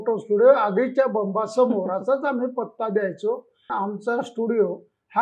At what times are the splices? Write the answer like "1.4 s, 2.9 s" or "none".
3.7 s